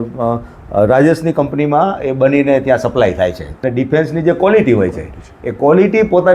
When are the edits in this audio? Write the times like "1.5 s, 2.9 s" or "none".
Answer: 3.5 s